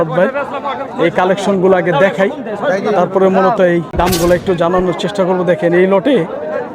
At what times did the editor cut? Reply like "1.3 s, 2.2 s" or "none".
3.9 s